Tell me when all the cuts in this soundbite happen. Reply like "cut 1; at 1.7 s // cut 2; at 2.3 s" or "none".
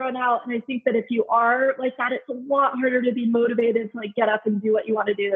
none

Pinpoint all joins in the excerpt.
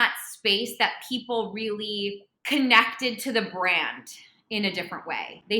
cut 1; at 2.3 s

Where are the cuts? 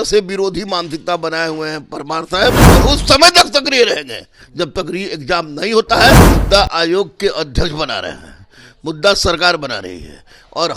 cut 1; at 2.6 s // cut 2; at 6.3 s

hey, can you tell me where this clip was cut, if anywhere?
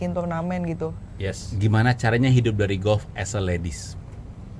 cut 1; at 1.5 s

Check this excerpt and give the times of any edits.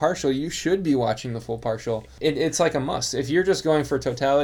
cut 1; at 2.1 s

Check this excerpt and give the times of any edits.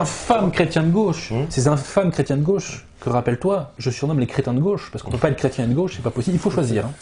none

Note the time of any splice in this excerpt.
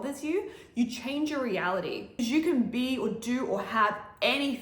cut 1; at 2.1 s

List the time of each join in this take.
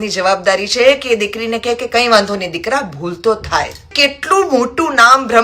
cut 1; at 3.9 s

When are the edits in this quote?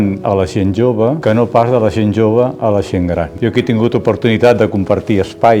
cut 1; at 1.2 s // cut 2; at 3.3 s

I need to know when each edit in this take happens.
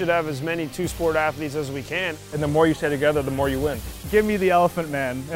cut 1; at 2.2 s // cut 2; at 4.1 s

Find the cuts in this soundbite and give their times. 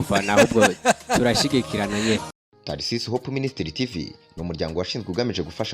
cut 1; at 2.3 s

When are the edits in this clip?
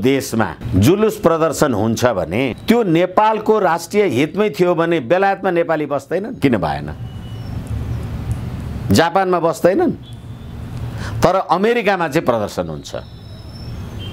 none

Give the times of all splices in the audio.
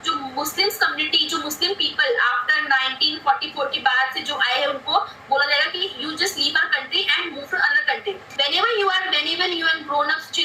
cut 1; at 8.3 s

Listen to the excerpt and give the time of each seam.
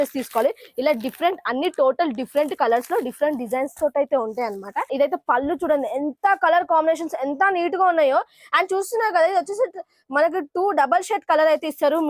cut 1; at 4.9 s

